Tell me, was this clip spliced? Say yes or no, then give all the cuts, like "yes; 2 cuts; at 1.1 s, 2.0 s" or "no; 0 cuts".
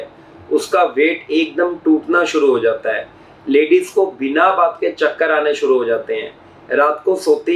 no; 0 cuts